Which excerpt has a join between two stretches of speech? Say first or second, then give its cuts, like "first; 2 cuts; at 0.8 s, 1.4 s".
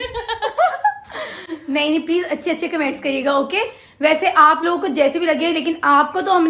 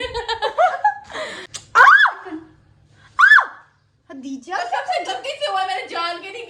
second; 1 cut; at 1.5 s